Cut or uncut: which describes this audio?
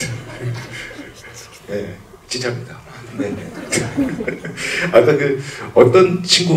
uncut